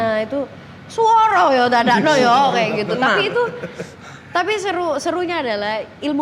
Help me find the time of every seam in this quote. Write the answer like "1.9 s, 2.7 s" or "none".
none